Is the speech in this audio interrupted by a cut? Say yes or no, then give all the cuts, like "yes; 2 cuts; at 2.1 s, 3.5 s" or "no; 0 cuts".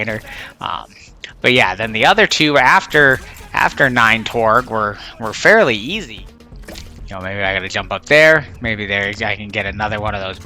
yes; 1 cut; at 6.0 s